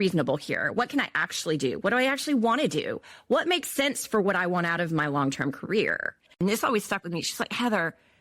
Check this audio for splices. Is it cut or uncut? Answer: cut